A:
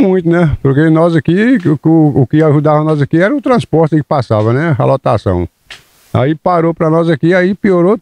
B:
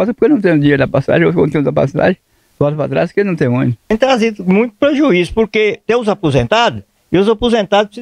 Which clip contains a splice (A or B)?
B